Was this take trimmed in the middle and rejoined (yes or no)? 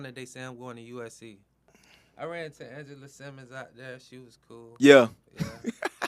yes